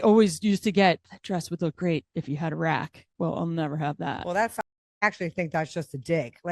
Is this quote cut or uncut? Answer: cut